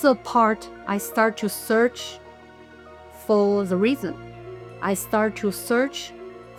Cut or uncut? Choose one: uncut